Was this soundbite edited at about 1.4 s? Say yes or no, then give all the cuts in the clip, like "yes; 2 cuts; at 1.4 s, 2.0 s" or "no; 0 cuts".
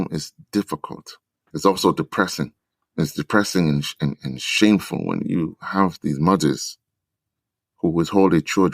yes; 1 cut; at 1.4 s